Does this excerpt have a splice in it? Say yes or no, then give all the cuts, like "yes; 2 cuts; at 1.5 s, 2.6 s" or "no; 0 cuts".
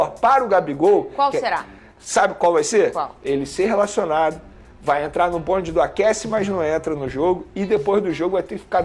no; 0 cuts